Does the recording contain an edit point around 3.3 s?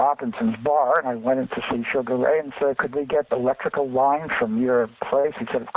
yes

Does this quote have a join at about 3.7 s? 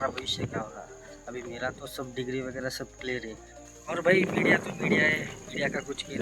yes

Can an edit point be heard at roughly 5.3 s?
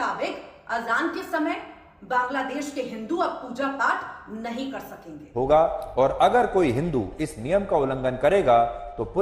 yes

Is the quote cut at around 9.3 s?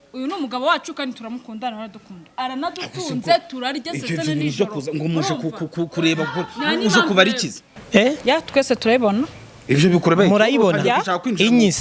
no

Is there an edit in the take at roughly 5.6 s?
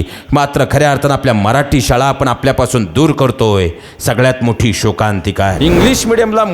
yes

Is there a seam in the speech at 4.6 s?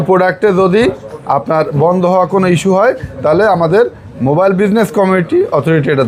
no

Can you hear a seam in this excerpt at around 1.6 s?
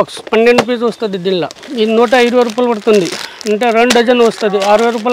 yes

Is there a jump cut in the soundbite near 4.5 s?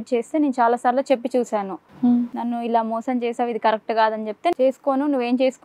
yes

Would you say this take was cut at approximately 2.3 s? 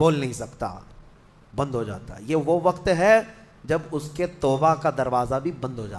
no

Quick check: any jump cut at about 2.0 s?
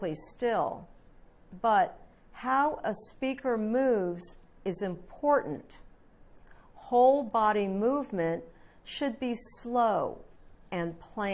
no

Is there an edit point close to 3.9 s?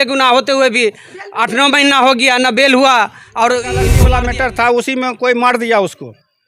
yes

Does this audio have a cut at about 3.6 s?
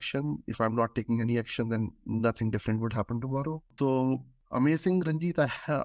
yes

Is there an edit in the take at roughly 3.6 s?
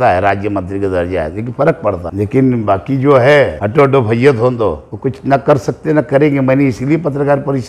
yes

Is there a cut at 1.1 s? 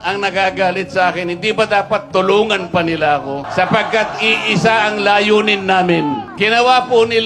no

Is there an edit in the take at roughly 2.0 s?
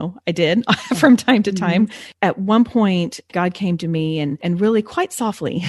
yes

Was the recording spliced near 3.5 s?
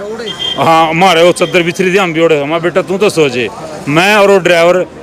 no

